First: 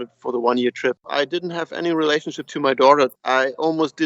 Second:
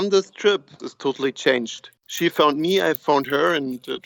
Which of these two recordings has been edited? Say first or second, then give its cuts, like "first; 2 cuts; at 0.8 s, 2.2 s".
first; 2 cuts; at 1.0 s, 3.2 s